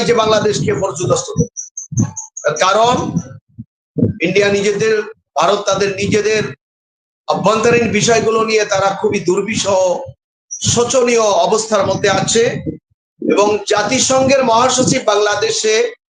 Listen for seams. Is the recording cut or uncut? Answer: uncut